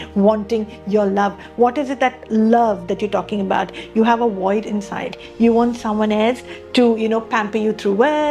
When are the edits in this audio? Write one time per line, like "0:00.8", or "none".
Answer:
none